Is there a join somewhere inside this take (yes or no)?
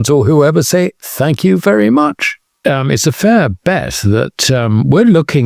yes